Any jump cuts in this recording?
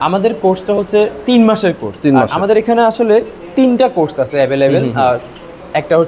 no; 0 cuts

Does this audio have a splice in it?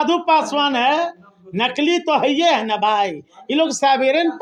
no; 0 cuts

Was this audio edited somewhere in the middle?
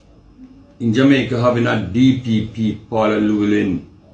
no; 0 cuts

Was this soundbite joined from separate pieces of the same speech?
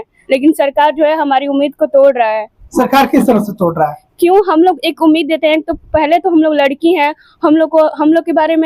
no; 0 cuts

